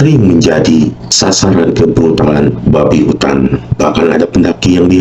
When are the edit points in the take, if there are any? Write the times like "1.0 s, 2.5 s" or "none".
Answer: 1.1 s, 3.7 s